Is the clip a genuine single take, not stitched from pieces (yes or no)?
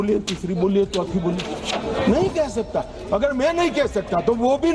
yes